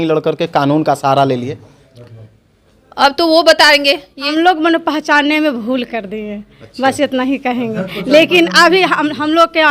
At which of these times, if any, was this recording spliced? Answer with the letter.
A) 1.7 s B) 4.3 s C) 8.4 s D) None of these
B